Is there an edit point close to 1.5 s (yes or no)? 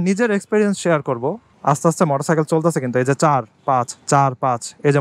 yes